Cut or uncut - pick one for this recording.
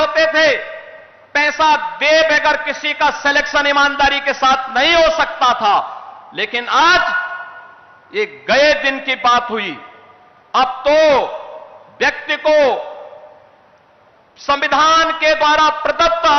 uncut